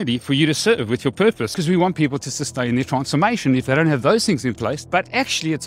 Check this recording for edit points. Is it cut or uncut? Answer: cut